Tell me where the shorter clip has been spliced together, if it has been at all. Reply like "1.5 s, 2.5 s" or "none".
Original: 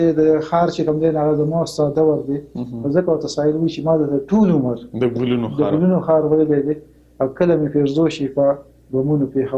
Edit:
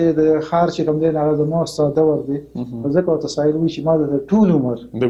none